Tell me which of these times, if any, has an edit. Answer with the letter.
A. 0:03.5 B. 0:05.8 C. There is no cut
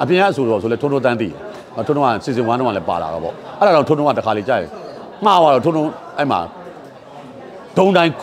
C